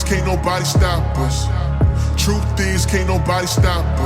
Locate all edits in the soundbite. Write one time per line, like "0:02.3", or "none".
none